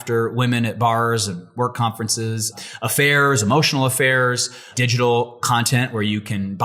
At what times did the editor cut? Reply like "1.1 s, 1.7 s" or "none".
2.5 s, 4.6 s